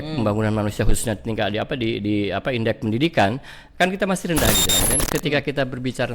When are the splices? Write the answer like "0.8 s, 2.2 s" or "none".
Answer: 4.7 s